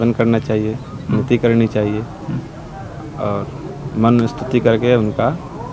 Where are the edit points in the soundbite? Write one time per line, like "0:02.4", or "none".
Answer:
none